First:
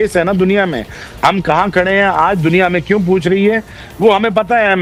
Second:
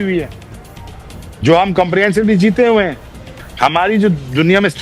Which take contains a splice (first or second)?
second